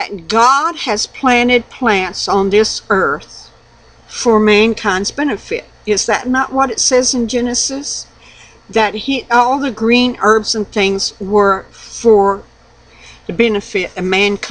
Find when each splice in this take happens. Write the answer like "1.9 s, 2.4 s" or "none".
none